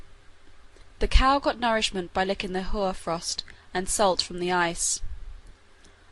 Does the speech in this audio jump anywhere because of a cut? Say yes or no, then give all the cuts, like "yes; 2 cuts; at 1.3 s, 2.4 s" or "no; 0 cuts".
yes; 1 cut; at 2.4 s